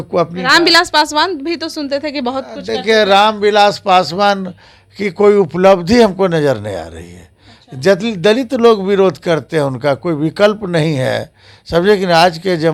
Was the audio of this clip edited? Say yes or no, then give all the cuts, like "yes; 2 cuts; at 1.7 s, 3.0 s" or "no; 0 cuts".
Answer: no; 0 cuts